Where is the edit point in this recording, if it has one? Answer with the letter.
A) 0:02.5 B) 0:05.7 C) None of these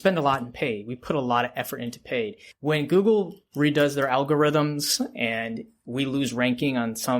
A